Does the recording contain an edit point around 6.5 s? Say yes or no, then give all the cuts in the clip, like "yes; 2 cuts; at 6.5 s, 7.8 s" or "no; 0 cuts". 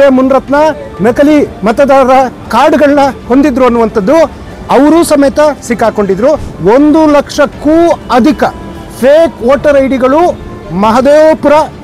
yes; 1 cut; at 6.5 s